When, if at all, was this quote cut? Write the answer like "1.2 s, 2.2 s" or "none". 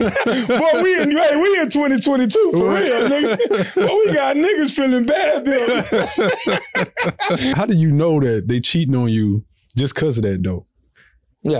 7.5 s

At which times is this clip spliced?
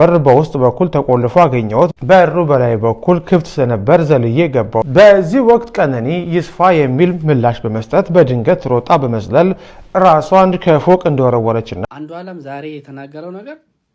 4.9 s, 11.9 s

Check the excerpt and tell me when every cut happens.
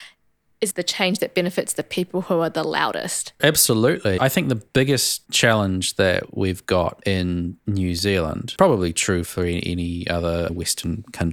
none

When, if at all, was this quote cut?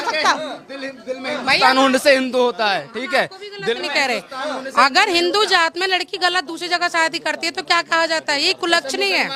none

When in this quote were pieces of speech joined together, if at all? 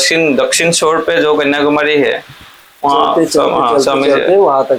none

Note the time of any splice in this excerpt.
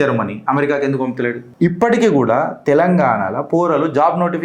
1.4 s

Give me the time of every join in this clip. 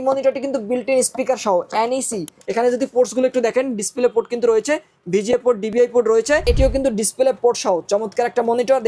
2.4 s, 6.4 s

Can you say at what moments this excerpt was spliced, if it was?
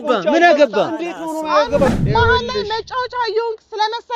1.9 s

